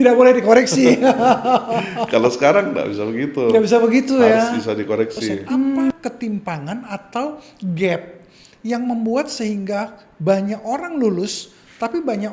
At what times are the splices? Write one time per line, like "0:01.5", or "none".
0:05.9